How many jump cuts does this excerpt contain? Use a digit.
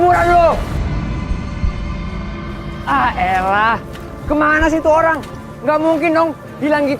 1